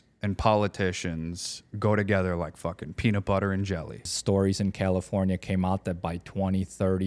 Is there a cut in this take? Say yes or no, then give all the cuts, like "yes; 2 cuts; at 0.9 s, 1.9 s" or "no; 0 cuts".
yes; 1 cut; at 4.0 s